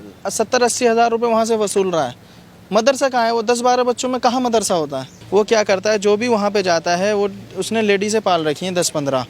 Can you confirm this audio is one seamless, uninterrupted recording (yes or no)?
no